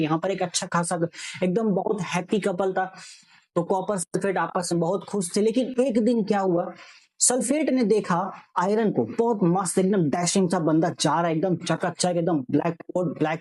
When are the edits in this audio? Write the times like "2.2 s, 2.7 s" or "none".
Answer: none